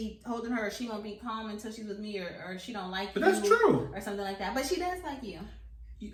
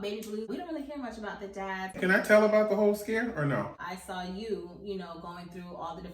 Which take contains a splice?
second; 2 cuts; at 2.0 s, 3.8 s

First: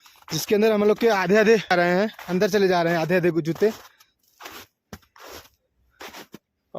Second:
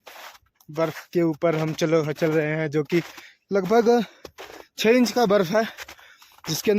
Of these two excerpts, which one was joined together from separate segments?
first; 1 cut; at 2.1 s

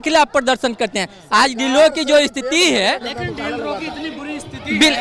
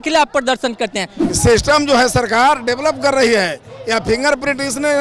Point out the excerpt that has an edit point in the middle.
second; 1 cut; at 1.2 s

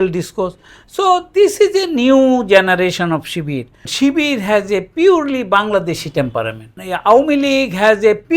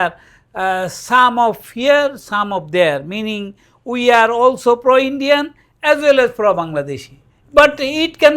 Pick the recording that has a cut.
first; 2 cuts; at 3.8 s, 6.7 s

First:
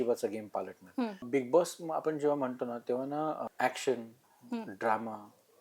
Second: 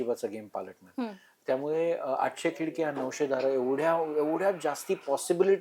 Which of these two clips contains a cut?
first; 2 cuts; at 1.2 s, 3.5 s

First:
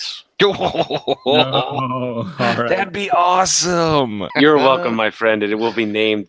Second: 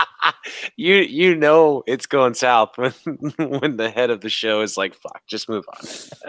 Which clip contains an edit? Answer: first; 1 cut; at 4.3 s

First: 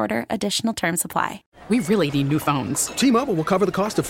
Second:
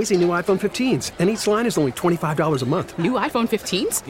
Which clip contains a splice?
first; 1 cut; at 1.5 s

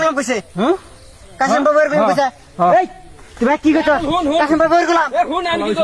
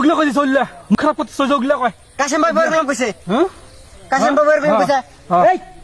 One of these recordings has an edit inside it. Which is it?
second; 1 cut; at 0.9 s

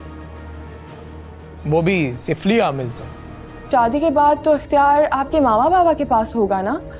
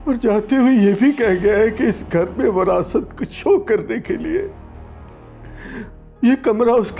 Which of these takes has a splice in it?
first; 1 cut; at 3.5 s

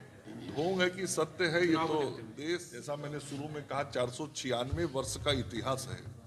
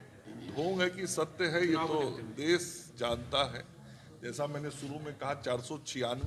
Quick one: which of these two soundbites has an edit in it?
first; 1 cut; at 2.7 s

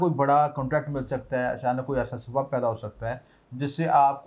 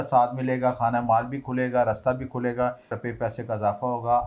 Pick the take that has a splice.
second; 1 cut; at 3.0 s

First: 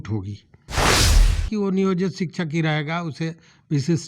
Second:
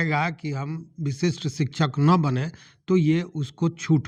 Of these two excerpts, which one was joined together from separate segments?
first; 1 cut; at 1.0 s

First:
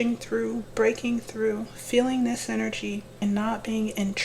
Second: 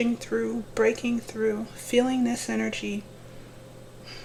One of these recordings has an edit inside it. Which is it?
first; 1 cut; at 3.1 s

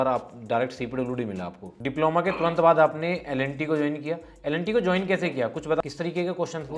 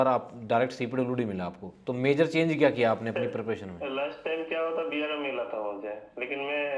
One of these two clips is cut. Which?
first; 2 cuts; at 1.6 s, 5.8 s

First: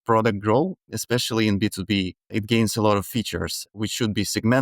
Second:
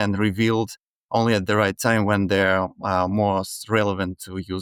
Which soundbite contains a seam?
first; 3 cuts; at 0.9 s, 2.3 s, 3.8 s

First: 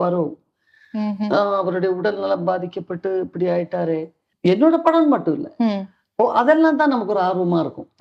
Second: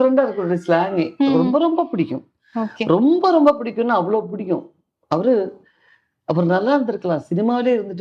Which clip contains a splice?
first; 1 cut; at 4.2 s

